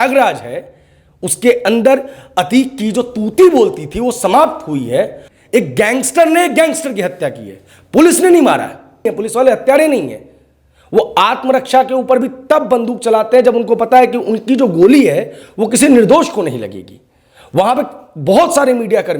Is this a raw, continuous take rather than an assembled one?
no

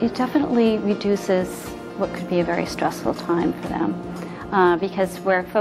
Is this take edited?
yes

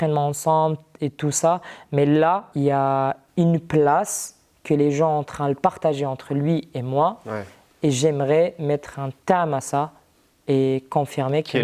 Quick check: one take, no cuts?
no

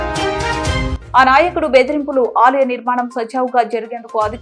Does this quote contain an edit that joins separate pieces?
no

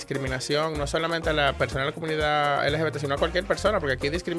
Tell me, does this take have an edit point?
no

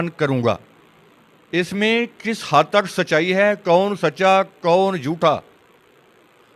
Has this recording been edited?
no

